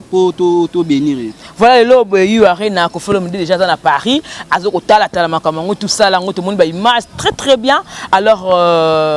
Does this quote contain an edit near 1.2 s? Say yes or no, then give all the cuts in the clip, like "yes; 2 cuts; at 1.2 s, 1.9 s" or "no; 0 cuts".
no; 0 cuts